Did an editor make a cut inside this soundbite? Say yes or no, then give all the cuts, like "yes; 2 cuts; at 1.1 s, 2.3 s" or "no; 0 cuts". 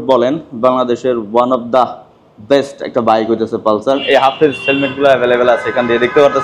yes; 1 cut; at 4.0 s